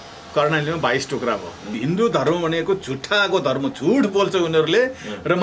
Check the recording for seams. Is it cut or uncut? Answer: cut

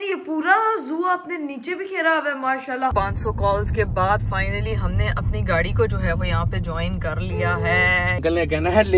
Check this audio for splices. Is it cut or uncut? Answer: cut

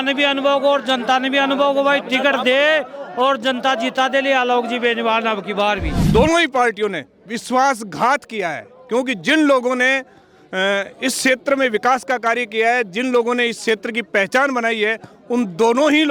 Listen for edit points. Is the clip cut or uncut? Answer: cut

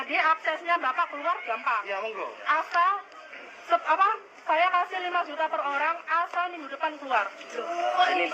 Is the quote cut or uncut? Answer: uncut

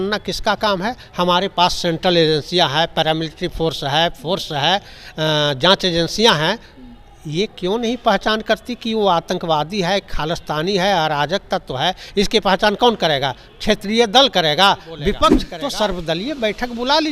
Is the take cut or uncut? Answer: cut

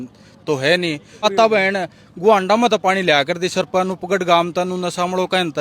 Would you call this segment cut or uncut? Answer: cut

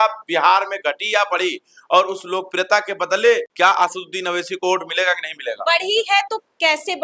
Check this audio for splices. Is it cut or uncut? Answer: uncut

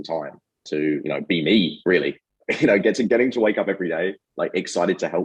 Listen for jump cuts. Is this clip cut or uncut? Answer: uncut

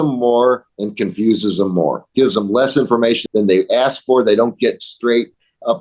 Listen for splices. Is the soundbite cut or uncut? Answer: cut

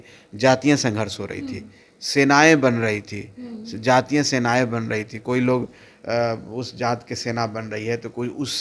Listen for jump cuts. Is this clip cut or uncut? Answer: uncut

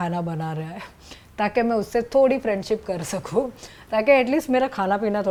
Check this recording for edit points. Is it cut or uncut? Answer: uncut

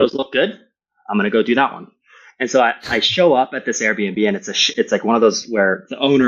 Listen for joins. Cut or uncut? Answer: uncut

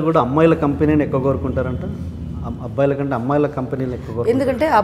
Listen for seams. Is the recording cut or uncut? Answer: uncut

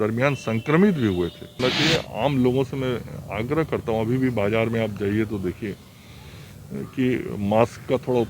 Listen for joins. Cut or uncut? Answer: cut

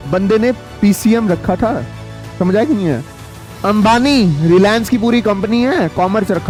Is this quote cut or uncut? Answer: uncut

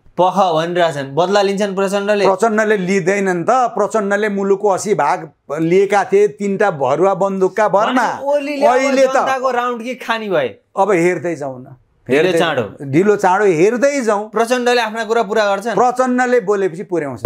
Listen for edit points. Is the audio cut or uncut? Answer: uncut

